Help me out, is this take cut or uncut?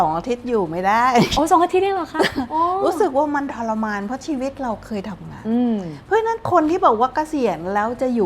uncut